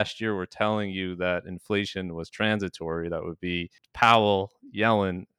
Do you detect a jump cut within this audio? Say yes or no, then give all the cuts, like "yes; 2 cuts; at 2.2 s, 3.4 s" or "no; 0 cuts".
yes; 1 cut; at 3.8 s